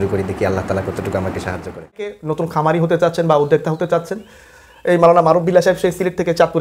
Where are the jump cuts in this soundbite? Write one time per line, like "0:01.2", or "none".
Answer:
0:02.1